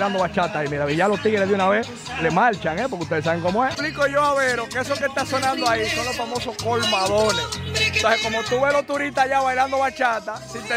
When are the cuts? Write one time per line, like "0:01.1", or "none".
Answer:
none

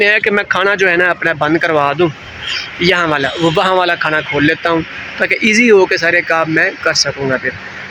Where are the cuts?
none

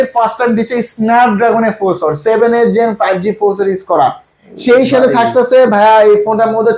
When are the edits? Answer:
none

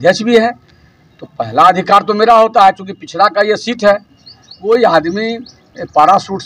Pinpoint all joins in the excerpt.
0:04.6

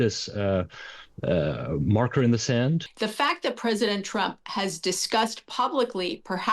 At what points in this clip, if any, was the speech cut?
0:02.9

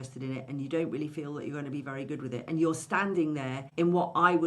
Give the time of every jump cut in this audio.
0:03.6

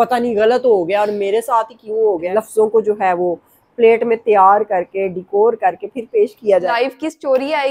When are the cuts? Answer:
0:02.3
0:06.7

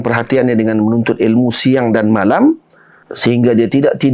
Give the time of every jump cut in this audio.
0:03.0

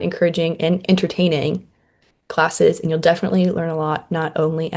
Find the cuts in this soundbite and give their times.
none

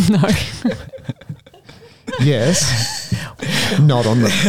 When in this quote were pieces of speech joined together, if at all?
0:03.3

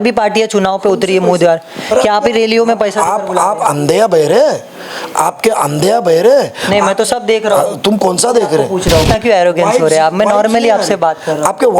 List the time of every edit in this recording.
0:09.1

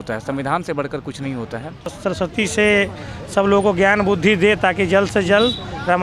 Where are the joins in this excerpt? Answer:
0:01.9

